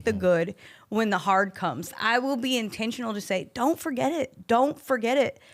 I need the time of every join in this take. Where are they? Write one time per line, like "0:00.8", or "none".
0:02.0